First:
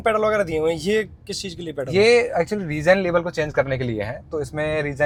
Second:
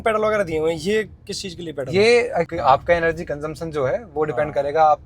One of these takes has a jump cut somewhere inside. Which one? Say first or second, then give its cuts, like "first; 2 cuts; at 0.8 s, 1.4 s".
second; 1 cut; at 2.5 s